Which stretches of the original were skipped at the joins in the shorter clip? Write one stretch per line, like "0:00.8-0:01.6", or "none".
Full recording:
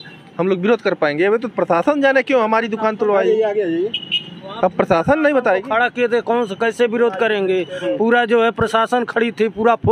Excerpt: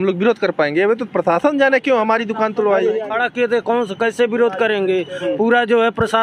0:03.5-0:05.7